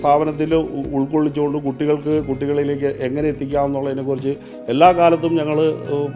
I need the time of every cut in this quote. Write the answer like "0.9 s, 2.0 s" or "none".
none